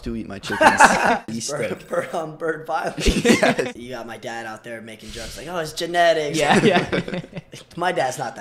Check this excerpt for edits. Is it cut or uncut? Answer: cut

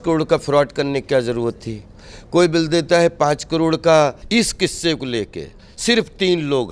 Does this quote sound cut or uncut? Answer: cut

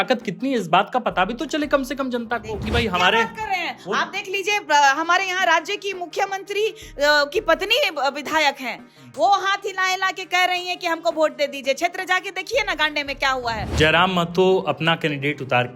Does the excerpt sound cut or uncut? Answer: cut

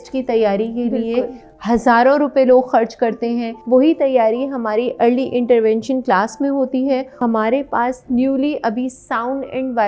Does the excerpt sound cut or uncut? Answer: cut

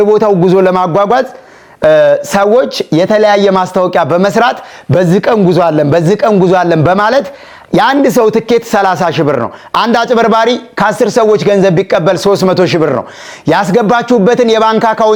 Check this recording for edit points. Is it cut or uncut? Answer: uncut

